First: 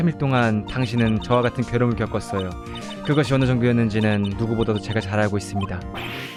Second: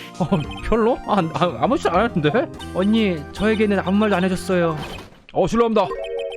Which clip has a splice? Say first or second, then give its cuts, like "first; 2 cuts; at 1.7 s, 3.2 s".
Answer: second; 1 cut; at 2.6 s